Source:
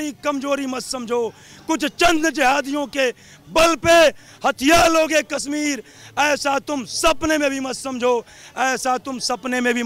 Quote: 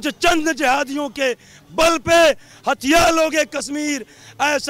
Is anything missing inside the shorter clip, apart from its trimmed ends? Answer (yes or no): no